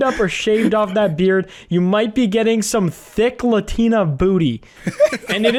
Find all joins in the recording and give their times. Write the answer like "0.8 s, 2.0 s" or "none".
none